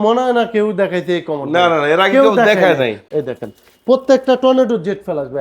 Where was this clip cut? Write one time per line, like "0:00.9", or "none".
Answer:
0:03.0